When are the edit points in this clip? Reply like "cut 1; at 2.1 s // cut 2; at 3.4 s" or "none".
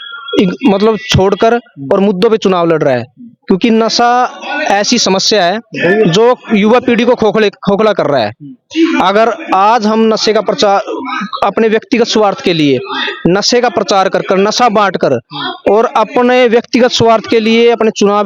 none

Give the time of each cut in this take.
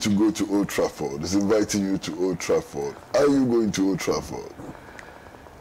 none

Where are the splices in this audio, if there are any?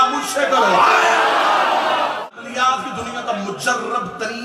cut 1; at 2.3 s

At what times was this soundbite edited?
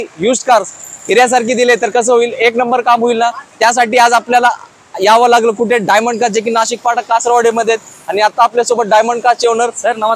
none

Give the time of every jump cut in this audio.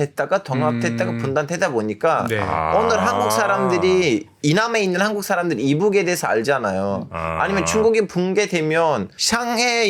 none

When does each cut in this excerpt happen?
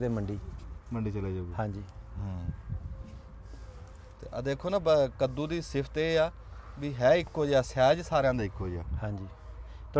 none

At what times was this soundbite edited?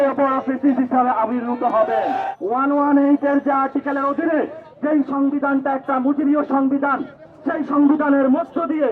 cut 1; at 2.3 s // cut 2; at 4.6 s

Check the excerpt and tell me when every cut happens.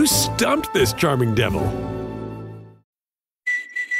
cut 1; at 2.7 s

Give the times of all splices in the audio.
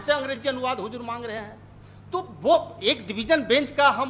none

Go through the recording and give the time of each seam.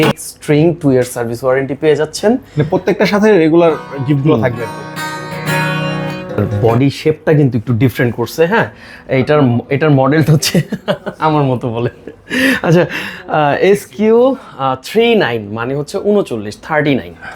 cut 1; at 6.4 s

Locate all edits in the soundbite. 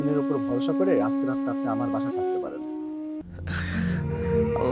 cut 1; at 3.3 s

